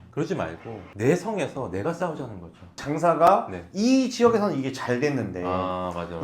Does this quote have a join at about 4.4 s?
no; 1 cut; at 2.8 s

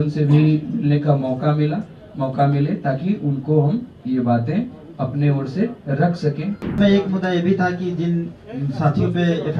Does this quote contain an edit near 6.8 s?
yes; 1 cut; at 6.8 s

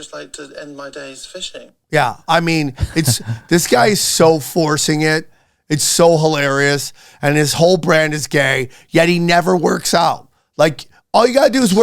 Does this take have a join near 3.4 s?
no; 1 cut; at 1.7 s

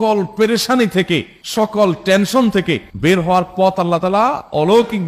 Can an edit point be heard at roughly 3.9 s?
no; 0 cuts

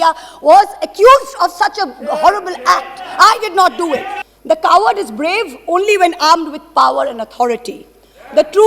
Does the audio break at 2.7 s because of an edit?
no; 1 cut; at 4.2 s

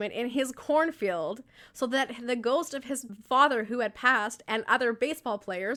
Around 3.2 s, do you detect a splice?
no; 0 cuts

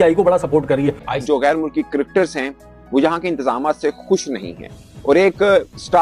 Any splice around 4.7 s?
no; 1 cut; at 1.1 s

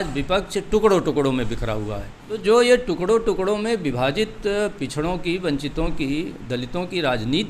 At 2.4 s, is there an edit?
yes; 1 cut; at 2.4 s

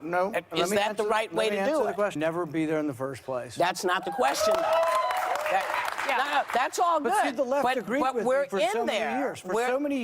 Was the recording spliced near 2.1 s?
yes; 1 cut; at 2.1 s

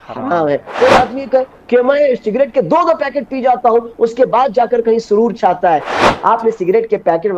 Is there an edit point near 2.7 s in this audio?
no; 1 cut; at 6.0 s

